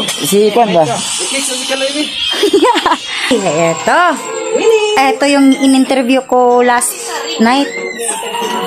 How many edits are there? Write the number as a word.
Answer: one